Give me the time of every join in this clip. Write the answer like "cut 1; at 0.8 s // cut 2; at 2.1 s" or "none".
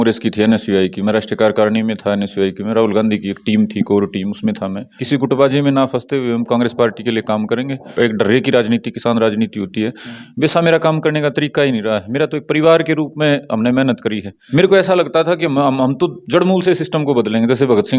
cut 1; at 4.9 s // cut 2; at 7.9 s // cut 3; at 14.3 s